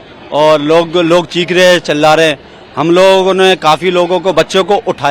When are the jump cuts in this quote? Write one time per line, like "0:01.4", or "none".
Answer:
none